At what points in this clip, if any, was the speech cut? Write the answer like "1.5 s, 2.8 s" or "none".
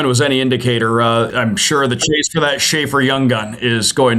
1.3 s